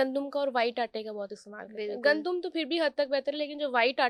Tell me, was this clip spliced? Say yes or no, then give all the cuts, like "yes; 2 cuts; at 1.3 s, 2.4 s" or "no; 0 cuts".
no; 0 cuts